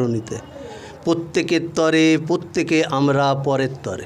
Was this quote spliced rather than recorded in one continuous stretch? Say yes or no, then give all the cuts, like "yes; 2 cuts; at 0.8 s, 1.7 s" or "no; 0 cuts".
no; 0 cuts